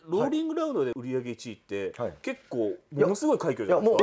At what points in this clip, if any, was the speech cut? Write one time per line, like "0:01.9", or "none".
none